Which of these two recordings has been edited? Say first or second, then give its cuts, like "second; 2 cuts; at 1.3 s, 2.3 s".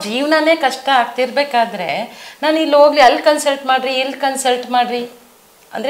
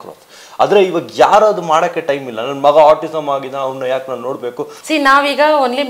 second; 1 cut; at 4.8 s